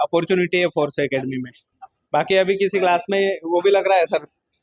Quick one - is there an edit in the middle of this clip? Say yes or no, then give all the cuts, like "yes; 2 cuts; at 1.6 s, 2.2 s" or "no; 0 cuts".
no; 0 cuts